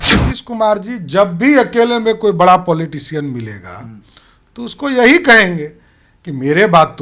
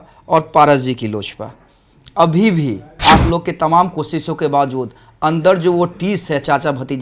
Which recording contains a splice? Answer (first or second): second